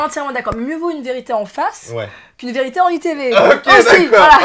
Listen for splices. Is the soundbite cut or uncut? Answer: uncut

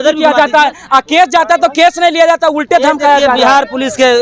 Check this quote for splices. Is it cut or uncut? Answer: uncut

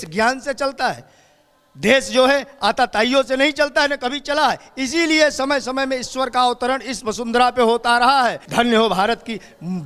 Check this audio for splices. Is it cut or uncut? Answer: cut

